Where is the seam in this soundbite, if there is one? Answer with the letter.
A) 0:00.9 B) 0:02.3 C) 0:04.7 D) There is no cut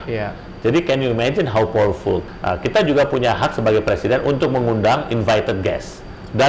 B